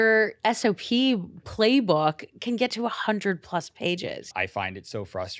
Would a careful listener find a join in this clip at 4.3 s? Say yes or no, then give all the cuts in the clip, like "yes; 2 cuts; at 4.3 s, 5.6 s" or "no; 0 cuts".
yes; 1 cut; at 4.3 s